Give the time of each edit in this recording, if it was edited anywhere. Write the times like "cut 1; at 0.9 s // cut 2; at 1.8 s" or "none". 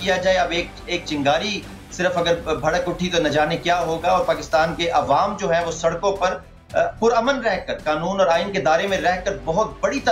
none